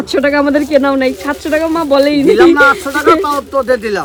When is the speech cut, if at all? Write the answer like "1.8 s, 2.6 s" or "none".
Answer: none